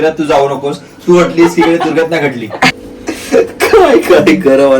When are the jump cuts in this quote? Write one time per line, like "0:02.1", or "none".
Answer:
0:02.9